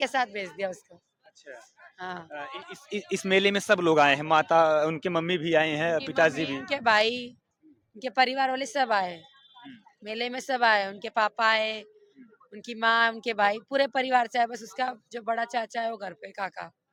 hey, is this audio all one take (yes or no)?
yes